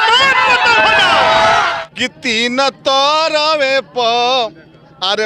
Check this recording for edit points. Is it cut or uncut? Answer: cut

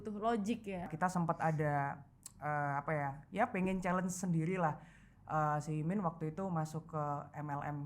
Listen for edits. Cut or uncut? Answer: cut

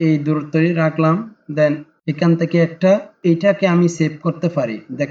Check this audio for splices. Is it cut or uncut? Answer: cut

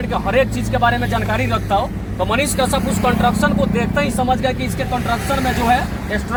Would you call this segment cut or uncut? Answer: uncut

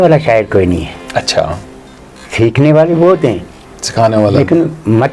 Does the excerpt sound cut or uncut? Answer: uncut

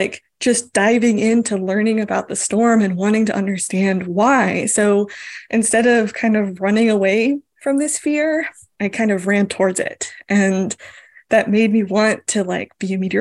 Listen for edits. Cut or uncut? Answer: uncut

